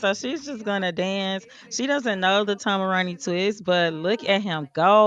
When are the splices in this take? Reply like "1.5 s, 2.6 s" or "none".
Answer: none

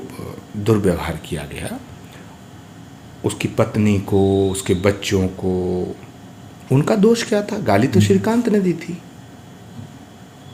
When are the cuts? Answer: none

